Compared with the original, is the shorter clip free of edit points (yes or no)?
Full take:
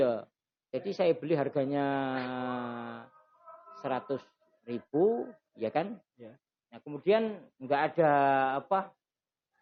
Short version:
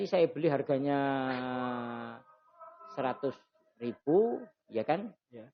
yes